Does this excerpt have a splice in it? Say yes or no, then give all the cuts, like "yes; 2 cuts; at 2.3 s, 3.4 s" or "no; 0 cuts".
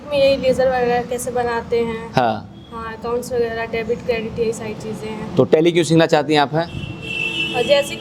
no; 0 cuts